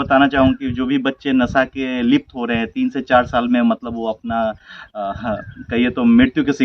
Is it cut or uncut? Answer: uncut